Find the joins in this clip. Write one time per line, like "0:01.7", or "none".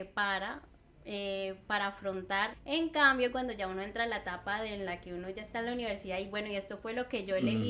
0:02.6